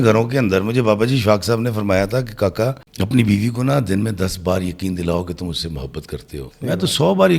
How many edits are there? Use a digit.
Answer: 2